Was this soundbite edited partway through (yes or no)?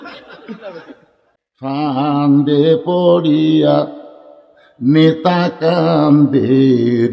yes